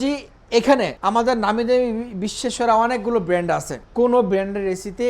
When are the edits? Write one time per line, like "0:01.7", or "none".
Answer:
0:00.9
0:03.8